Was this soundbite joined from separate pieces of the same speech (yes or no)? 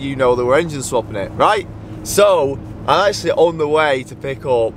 no